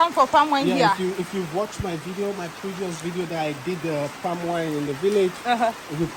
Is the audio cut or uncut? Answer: uncut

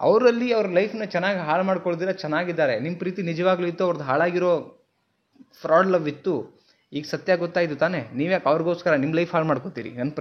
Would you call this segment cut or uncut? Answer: uncut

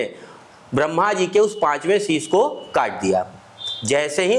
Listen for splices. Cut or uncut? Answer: uncut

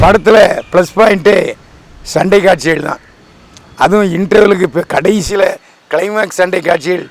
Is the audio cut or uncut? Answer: uncut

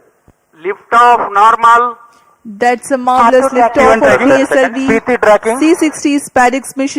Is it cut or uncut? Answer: uncut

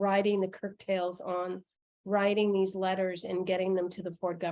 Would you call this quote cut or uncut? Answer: uncut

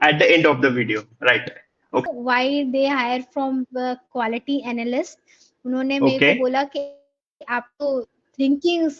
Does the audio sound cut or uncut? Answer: cut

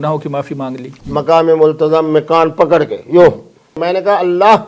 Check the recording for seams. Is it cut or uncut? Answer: cut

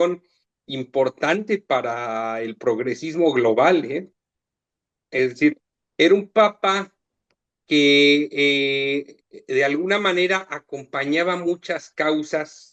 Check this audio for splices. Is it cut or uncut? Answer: uncut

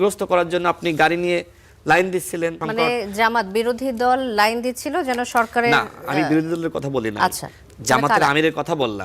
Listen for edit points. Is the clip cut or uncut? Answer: cut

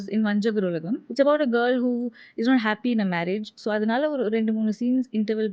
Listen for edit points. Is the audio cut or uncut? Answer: cut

